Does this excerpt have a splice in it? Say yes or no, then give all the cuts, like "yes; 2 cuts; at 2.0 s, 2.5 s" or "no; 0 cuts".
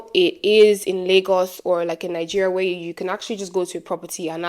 no; 0 cuts